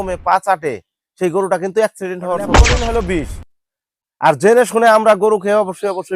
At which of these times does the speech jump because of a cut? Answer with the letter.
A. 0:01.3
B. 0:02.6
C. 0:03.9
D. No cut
B